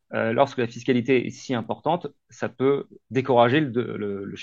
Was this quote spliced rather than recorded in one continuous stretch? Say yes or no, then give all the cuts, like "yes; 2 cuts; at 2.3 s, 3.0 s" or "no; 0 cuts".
no; 0 cuts